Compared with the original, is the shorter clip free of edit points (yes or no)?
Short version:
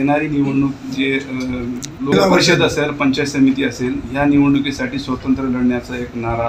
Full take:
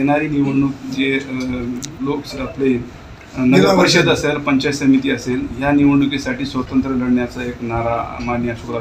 no